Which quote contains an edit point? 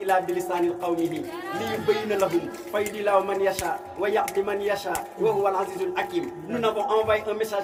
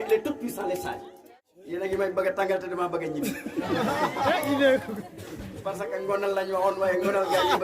second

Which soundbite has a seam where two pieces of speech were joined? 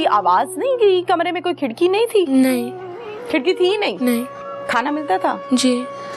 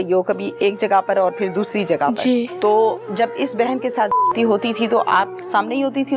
second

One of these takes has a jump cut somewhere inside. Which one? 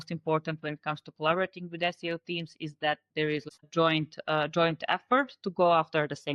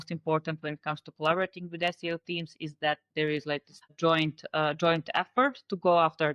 first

